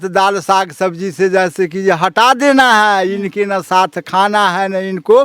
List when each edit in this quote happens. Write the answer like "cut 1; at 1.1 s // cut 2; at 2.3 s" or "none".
none